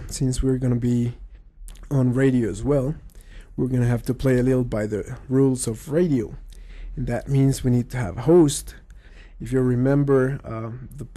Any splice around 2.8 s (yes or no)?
no